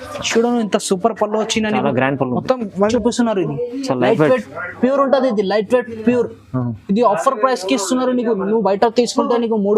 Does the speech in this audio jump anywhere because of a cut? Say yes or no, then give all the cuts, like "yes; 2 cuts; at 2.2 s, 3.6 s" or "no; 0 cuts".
yes; 1 cut; at 2.9 s